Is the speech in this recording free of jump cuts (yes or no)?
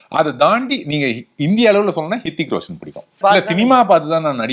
no